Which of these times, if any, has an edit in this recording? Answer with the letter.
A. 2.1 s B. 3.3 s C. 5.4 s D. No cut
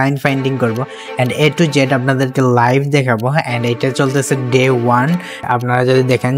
C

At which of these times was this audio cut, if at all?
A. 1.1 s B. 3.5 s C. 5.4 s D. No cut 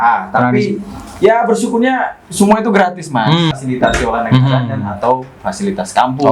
B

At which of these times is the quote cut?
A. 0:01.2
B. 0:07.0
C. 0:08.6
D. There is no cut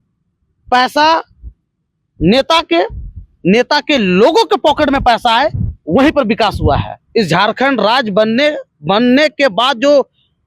B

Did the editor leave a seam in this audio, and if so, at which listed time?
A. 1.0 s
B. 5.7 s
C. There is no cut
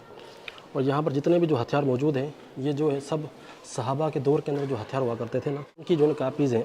B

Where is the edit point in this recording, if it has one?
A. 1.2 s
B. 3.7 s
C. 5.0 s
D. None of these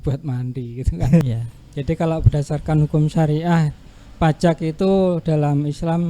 A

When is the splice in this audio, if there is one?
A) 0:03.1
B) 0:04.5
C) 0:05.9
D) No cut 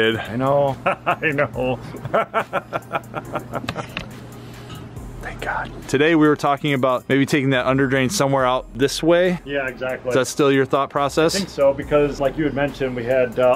C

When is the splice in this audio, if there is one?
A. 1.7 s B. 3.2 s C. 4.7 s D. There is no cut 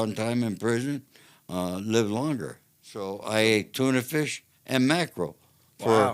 B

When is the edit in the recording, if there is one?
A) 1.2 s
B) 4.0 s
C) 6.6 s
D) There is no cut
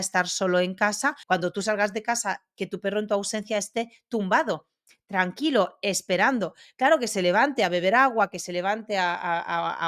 A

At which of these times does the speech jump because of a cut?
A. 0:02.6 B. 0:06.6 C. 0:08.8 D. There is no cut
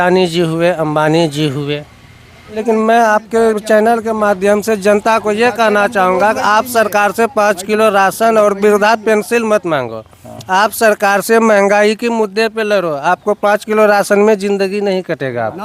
A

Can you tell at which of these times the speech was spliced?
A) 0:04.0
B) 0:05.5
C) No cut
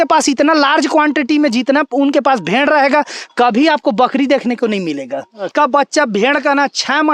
B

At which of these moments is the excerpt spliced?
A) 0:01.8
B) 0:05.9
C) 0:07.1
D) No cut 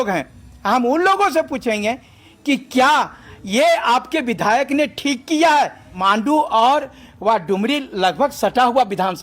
B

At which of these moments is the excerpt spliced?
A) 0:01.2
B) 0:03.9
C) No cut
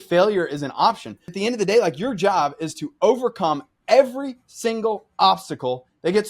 A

